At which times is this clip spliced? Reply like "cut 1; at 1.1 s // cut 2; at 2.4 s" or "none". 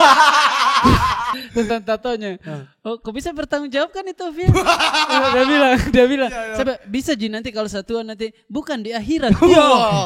cut 1; at 1.3 s